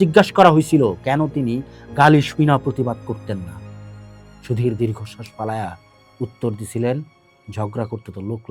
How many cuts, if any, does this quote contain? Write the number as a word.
zero